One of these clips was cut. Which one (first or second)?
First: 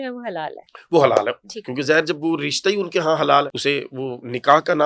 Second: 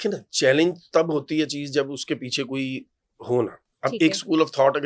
first